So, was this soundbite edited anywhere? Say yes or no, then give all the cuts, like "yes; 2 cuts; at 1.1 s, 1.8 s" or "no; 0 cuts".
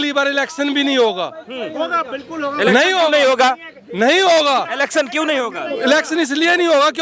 no; 0 cuts